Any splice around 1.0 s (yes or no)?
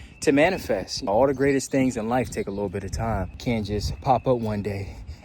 yes